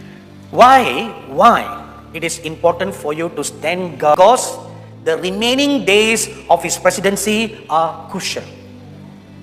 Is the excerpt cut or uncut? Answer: cut